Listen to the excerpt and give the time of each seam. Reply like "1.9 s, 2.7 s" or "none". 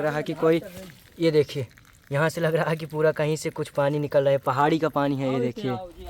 none